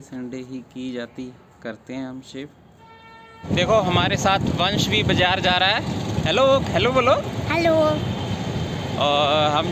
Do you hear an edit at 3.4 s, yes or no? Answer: yes